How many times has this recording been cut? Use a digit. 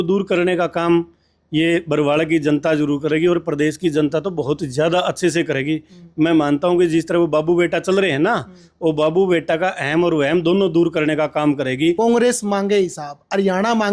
1